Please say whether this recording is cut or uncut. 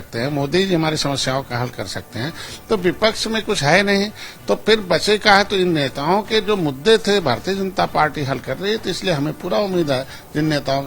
uncut